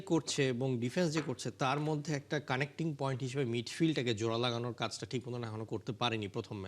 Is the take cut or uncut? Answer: uncut